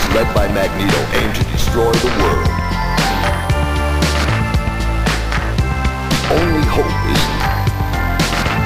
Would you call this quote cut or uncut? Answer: uncut